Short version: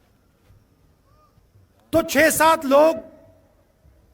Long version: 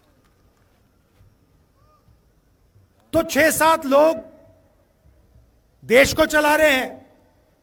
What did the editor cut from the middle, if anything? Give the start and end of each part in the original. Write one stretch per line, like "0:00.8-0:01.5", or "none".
0:02.1-0:02.6